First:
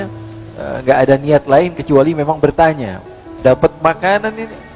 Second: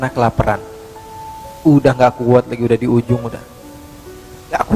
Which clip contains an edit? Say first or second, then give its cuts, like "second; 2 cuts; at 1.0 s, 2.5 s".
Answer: first; 1 cut; at 3.2 s